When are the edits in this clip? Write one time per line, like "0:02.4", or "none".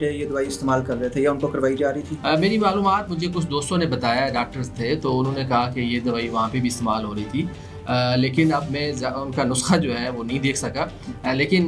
none